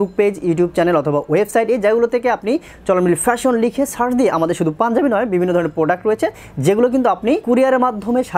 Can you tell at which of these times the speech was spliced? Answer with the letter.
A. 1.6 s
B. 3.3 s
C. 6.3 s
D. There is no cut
D